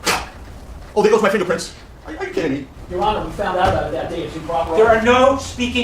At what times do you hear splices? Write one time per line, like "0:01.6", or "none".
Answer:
0:02.7